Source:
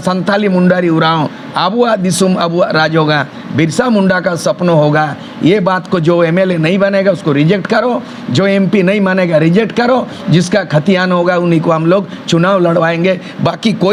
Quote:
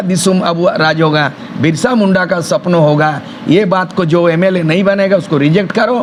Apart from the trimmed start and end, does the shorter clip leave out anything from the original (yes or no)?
no